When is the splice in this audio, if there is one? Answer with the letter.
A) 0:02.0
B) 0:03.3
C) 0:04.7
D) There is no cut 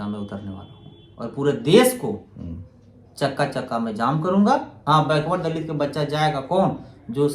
C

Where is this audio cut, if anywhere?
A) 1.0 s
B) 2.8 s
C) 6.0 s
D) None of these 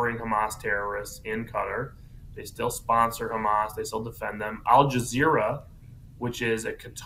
B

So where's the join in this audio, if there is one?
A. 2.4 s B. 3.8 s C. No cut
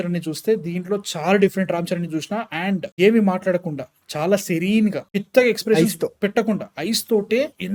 C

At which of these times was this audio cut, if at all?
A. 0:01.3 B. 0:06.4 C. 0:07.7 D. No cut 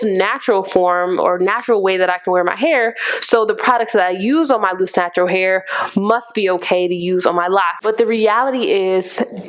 C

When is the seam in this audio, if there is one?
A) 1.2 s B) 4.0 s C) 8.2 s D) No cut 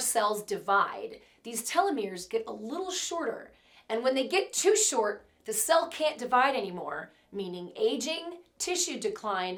D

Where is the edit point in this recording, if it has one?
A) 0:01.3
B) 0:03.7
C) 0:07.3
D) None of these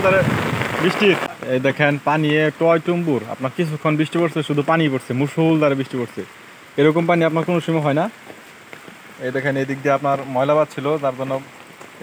A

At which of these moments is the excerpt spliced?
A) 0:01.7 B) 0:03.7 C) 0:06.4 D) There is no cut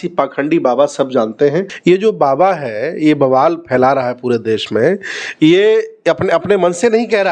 A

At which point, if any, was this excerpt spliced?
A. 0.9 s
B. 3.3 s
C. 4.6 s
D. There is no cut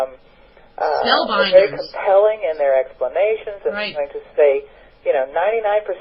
D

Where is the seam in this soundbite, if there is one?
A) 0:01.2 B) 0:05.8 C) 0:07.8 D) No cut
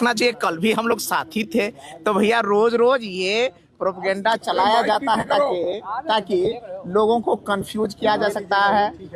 D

